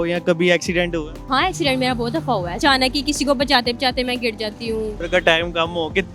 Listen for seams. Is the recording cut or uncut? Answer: cut